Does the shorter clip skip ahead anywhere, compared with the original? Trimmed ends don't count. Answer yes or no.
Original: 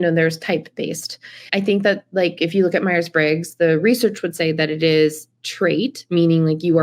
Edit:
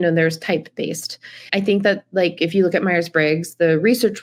no